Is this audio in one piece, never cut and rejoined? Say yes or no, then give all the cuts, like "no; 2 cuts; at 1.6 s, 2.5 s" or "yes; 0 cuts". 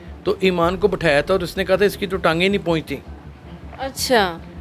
yes; 0 cuts